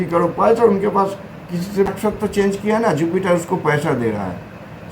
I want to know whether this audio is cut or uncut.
cut